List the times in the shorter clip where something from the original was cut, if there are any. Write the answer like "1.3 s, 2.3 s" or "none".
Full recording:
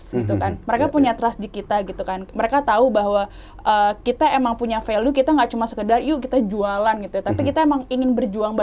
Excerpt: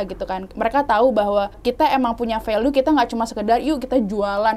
1.6 s